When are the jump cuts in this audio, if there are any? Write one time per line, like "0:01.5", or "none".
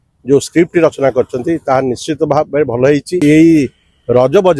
0:03.2